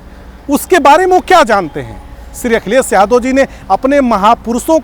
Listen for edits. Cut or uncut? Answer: uncut